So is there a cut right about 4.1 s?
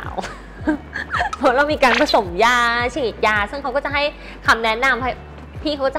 no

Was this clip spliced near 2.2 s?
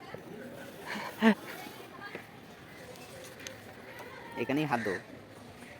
yes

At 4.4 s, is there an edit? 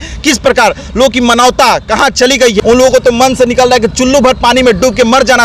no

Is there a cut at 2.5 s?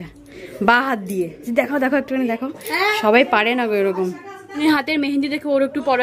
no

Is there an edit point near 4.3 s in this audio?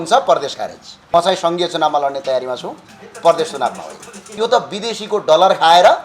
yes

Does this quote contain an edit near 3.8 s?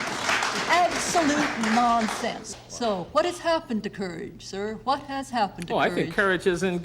no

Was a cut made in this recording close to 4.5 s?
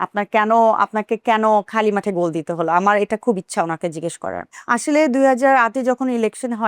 yes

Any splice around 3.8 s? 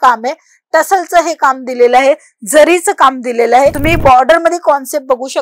yes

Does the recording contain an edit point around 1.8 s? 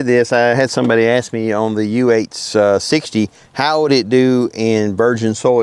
no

